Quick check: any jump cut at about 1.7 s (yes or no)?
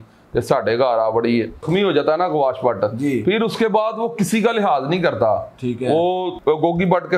yes